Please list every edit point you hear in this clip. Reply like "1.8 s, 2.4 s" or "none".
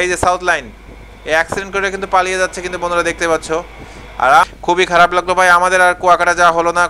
4.5 s